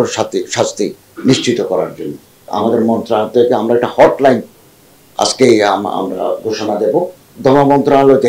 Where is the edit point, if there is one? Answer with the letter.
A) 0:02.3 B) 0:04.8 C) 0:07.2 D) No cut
C